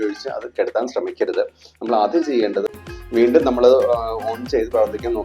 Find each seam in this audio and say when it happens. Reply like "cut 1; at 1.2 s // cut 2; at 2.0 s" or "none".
cut 1; at 2.7 s